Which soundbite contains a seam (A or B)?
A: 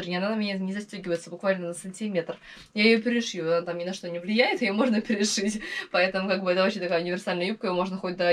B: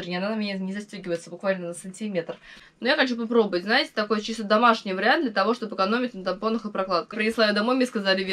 B